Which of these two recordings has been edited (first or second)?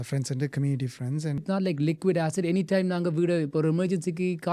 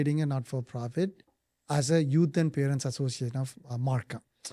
first